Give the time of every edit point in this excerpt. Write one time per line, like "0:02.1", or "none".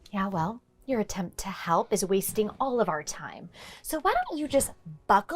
none